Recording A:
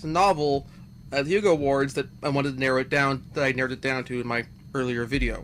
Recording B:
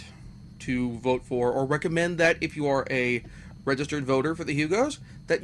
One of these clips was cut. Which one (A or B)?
B